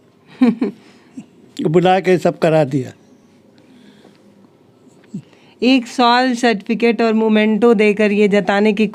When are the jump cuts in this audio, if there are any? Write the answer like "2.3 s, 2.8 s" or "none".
none